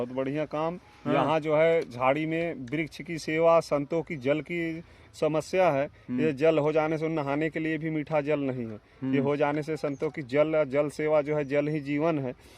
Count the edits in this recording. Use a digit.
0